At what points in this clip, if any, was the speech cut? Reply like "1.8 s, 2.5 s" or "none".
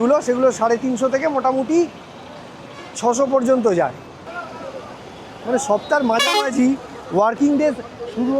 4.3 s